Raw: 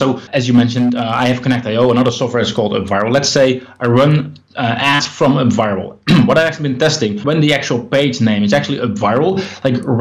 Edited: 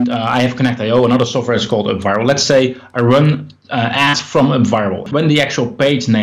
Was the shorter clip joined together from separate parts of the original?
yes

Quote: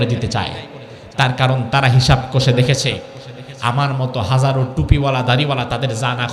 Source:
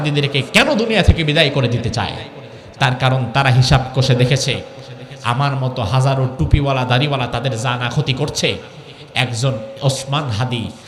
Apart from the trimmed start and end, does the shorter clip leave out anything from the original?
no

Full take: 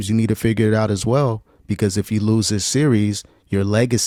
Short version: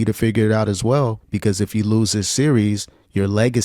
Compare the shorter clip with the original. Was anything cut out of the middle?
yes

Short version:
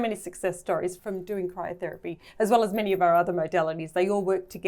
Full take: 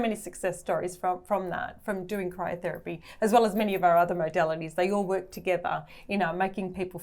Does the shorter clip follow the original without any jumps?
no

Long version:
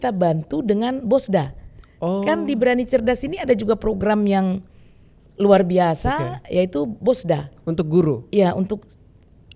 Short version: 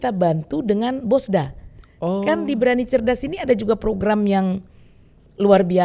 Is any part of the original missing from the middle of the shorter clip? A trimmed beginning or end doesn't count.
no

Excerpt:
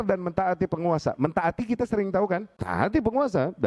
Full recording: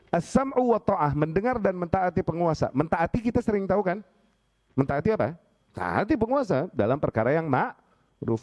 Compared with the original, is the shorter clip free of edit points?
no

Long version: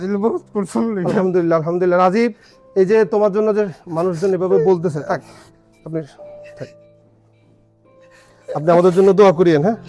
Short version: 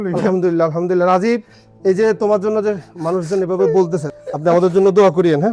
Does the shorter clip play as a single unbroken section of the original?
no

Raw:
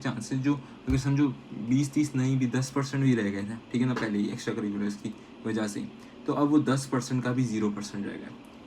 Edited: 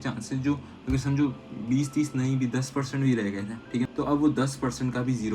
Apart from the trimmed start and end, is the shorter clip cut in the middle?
yes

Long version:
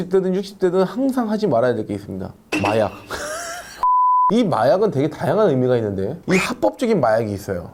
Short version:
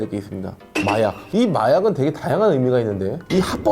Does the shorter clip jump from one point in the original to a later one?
yes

